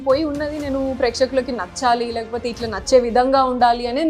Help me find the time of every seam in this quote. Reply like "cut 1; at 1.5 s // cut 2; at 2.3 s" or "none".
none